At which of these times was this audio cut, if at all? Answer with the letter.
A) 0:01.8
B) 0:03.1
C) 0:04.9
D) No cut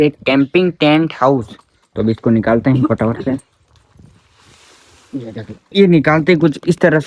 D